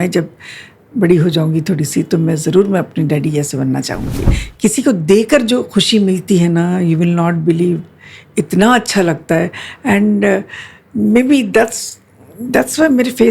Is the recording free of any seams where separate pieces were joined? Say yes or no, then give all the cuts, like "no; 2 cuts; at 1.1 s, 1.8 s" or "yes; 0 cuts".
no; 1 cut; at 4.3 s